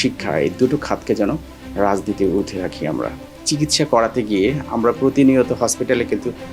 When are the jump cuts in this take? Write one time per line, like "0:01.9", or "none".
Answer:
0:03.2